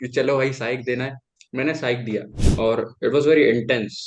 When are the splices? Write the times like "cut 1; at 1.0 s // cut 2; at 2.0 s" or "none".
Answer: cut 1; at 2.4 s